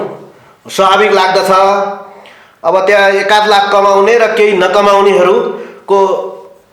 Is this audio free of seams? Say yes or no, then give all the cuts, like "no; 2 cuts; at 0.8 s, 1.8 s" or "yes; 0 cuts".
yes; 0 cuts